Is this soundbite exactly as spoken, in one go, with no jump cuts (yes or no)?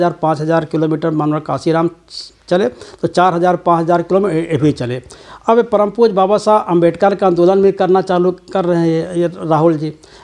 yes